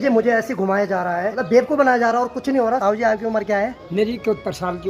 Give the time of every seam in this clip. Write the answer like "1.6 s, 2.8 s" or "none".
1.3 s, 2.8 s, 3.8 s